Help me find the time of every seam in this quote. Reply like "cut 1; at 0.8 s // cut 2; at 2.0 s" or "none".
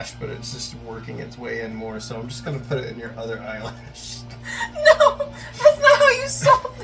none